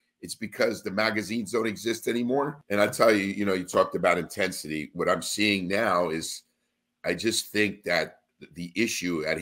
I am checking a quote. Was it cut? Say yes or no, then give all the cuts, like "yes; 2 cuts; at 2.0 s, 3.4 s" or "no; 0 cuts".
yes; 1 cut; at 2.6 s